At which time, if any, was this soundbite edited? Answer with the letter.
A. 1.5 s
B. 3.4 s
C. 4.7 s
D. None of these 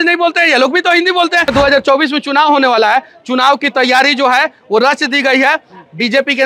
A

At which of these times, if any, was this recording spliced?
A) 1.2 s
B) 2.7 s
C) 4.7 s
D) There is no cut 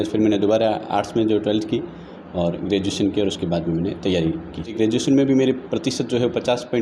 C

